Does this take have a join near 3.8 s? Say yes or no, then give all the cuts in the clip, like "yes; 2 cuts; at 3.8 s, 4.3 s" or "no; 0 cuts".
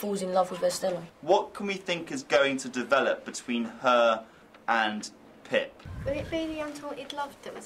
no; 1 cut; at 1.1 s